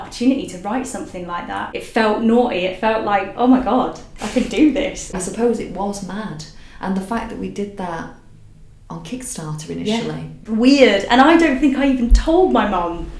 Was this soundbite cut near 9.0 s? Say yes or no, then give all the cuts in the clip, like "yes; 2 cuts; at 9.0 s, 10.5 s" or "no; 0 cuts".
no; 3 cuts; at 1.7 s, 5.1 s, 10.3 s